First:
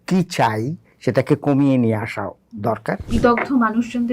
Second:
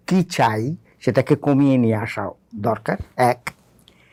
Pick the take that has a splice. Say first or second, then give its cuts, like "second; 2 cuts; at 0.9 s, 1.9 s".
first; 1 cut; at 3.1 s